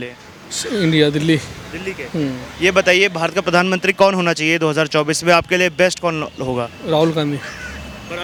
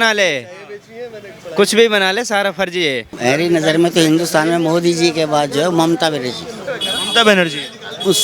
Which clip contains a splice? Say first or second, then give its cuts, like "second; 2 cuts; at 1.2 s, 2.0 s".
second; 1 cut; at 3.1 s